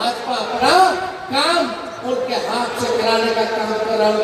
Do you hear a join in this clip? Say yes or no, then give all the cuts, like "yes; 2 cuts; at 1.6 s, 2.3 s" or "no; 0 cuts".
no; 0 cuts